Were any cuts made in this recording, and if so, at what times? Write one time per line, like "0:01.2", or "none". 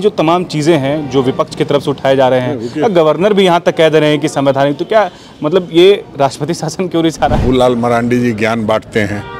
0:07.4